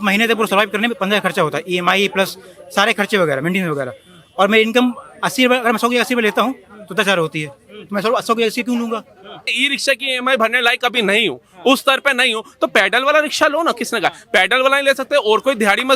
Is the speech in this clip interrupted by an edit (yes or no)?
yes